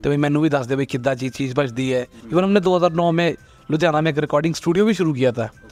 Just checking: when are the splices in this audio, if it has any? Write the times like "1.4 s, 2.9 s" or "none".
2.2 s